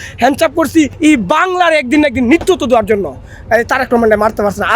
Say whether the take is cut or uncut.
cut